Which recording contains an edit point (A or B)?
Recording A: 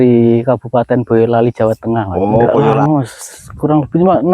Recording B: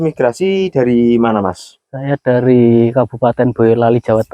A